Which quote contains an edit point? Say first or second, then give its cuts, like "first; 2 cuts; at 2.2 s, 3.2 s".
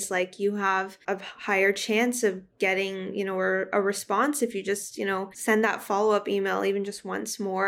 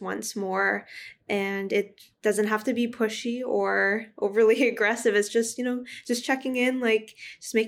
first; 2 cuts; at 0.9 s, 5.3 s